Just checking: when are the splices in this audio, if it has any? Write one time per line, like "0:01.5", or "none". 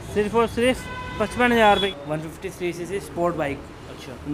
0:01.7